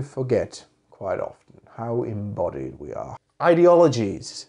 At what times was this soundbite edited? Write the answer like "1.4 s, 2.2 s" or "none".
3.1 s

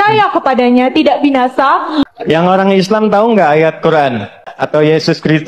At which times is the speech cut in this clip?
2.1 s, 4.5 s

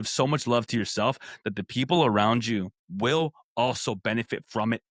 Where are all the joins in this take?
2.8 s

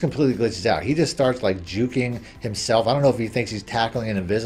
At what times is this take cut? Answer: none

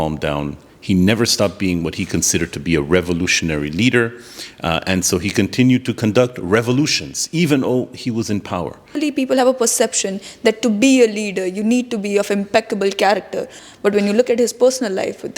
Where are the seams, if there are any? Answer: 9.0 s, 13.5 s

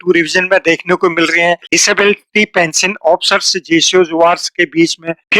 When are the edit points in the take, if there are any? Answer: 1.7 s

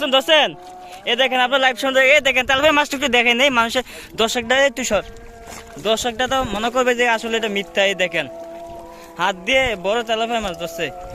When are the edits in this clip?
none

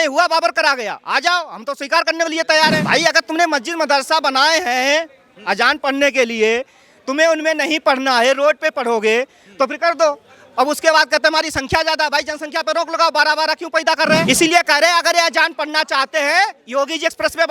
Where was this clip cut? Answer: 2.8 s, 14.2 s

